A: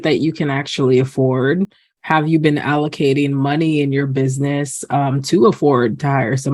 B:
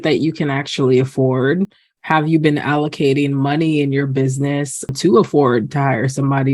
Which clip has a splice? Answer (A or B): B